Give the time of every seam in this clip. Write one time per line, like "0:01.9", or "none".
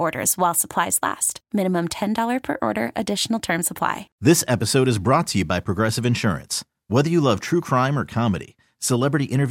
0:04.1